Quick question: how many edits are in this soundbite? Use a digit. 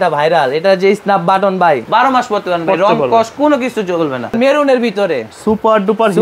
2